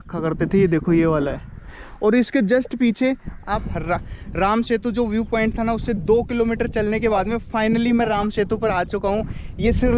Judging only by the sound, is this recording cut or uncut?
cut